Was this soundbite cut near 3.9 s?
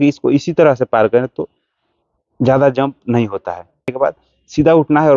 yes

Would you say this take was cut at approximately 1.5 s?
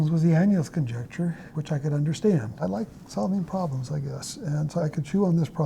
yes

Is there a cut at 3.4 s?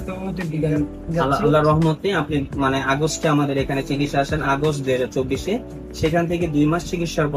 no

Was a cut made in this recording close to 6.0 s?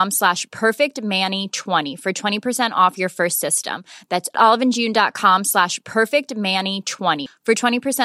no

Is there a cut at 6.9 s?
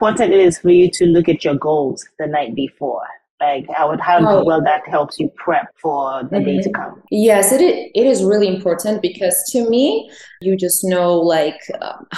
yes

